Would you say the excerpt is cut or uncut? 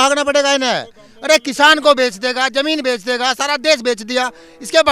uncut